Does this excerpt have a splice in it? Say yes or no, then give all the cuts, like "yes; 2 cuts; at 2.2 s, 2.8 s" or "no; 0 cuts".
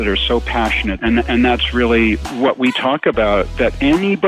yes; 2 cuts; at 0.9 s, 2.3 s